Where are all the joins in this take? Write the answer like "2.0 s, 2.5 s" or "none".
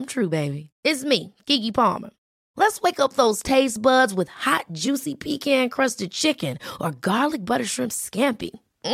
none